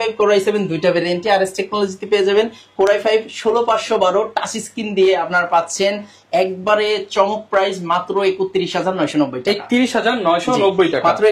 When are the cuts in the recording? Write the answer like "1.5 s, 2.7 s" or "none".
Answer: none